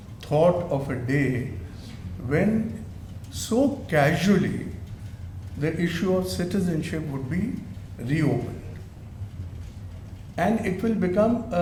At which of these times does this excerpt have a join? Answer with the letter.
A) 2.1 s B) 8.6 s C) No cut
C